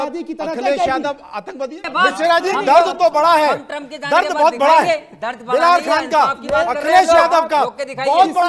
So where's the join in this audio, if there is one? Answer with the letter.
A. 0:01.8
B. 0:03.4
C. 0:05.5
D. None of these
A